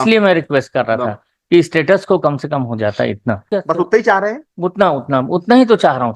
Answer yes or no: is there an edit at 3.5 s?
yes